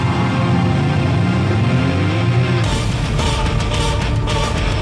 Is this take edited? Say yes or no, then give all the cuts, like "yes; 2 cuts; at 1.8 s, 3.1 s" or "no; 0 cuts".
no; 0 cuts